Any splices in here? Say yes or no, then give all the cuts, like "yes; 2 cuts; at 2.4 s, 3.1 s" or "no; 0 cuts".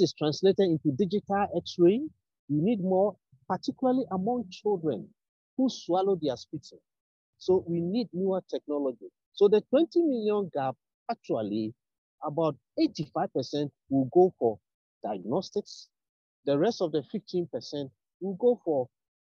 no; 0 cuts